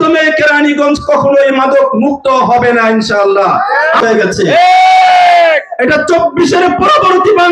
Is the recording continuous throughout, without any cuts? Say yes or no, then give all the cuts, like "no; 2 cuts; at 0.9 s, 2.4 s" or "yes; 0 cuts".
no; 1 cut; at 4.0 s